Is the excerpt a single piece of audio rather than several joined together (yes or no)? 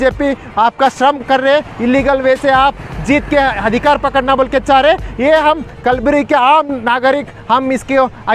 yes